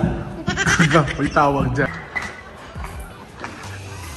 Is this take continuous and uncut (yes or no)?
no